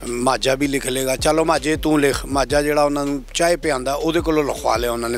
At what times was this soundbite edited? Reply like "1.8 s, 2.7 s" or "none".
none